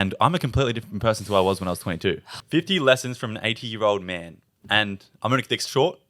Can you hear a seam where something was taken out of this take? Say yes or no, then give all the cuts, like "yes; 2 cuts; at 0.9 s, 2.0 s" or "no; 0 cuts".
yes; 1 cut; at 2.3 s